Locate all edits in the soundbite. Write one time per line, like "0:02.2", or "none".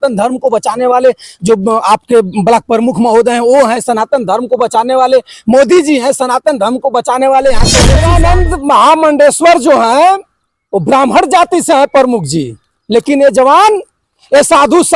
0:08.0

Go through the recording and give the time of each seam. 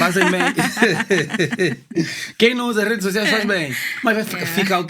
none

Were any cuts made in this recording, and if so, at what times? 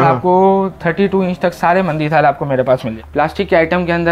0:02.9

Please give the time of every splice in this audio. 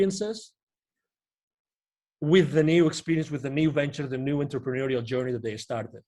none

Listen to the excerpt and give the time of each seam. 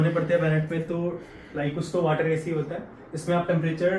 0:01.7

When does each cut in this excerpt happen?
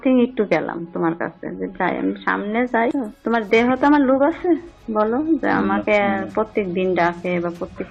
none

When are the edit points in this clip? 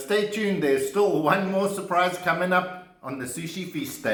none

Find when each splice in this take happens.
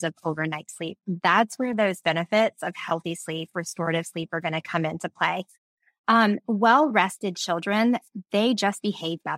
none

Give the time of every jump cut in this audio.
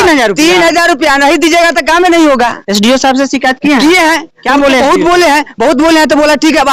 none

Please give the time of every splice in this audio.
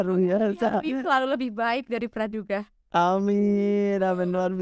none

